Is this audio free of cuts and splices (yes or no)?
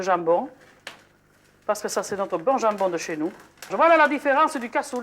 no